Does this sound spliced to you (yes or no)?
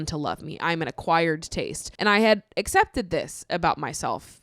yes